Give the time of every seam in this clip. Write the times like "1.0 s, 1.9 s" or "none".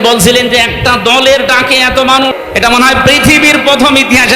2.3 s